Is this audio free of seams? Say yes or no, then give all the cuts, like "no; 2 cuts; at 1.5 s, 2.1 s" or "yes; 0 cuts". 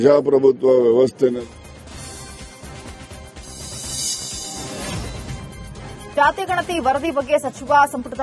no; 1 cut; at 1.3 s